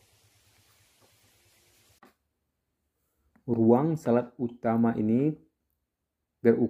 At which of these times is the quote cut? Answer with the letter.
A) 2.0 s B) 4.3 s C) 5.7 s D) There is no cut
A